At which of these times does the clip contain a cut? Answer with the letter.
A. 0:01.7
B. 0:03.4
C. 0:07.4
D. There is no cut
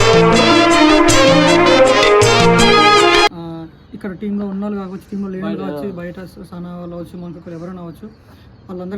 B